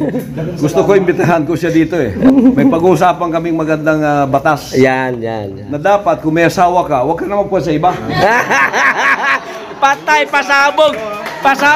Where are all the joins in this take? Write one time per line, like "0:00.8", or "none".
0:02.2